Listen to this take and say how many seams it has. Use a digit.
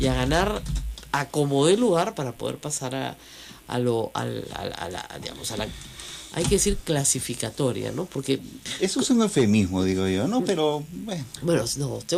0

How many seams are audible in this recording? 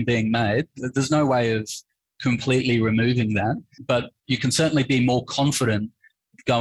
1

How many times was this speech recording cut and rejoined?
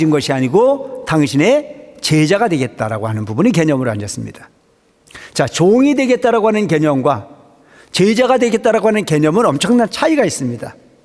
0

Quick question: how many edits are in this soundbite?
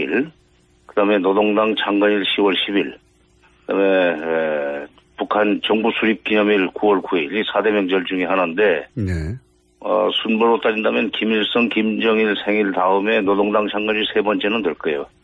0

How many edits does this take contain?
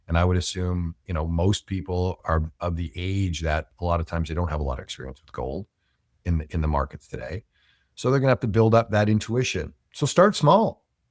1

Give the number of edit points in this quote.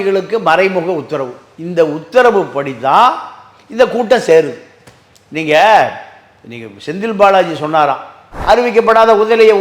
1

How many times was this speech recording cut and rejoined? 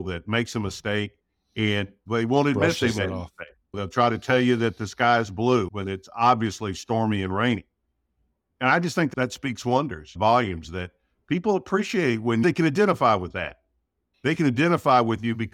1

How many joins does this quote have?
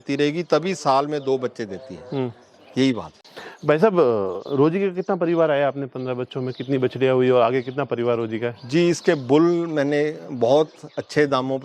0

